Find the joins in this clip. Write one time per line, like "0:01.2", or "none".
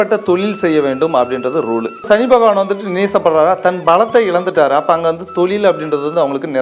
0:02.1